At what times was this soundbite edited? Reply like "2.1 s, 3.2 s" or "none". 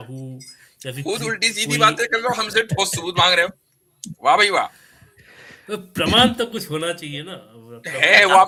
none